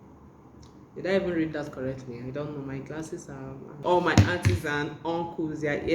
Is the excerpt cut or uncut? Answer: cut